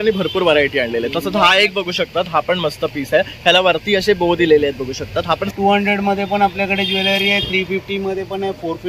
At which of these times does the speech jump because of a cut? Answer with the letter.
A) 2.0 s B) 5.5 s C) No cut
B